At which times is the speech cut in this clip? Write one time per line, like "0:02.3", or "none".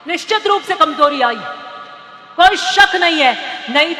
none